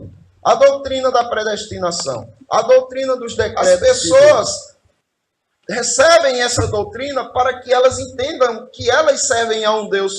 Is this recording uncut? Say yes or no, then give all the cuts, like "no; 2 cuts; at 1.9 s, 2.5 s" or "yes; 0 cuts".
no; 1 cut; at 3.8 s